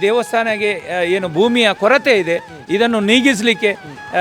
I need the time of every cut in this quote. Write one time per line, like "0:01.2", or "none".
none